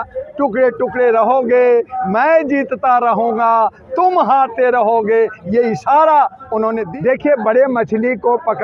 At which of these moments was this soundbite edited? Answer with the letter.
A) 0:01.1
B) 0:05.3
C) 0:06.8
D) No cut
C